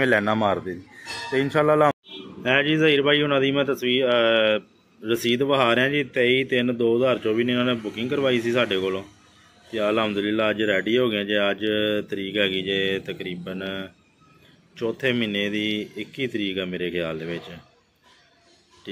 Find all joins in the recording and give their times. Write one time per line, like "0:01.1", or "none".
0:01.9